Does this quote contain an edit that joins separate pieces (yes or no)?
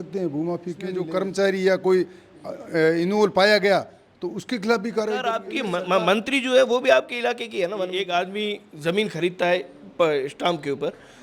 yes